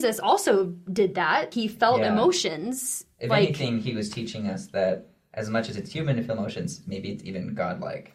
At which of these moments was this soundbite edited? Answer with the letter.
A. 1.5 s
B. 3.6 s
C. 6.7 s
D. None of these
A